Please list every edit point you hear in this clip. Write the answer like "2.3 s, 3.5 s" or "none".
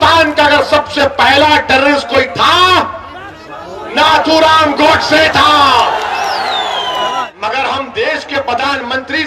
7.2 s